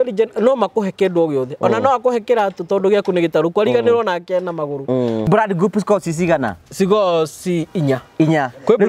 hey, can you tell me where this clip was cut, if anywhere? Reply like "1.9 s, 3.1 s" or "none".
5.3 s